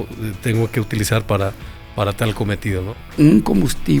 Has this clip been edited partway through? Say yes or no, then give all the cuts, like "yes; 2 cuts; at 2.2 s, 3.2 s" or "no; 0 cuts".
yes; 1 cut; at 2.9 s